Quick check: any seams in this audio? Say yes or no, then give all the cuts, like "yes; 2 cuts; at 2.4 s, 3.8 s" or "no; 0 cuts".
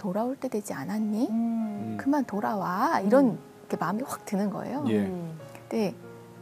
no; 0 cuts